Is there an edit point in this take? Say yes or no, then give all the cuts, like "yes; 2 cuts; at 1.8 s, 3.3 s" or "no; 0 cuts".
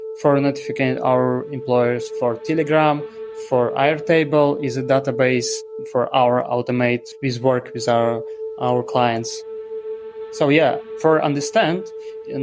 yes; 2 cuts; at 7.1 s, 9.7 s